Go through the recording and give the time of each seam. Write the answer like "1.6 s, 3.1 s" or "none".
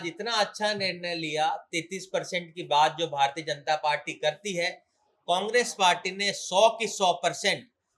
none